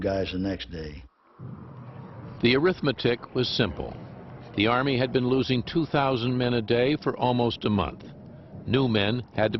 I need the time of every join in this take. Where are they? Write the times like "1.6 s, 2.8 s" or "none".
none